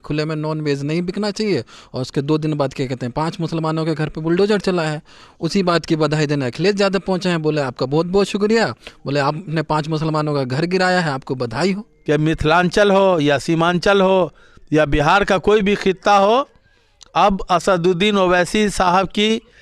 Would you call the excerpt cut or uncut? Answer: cut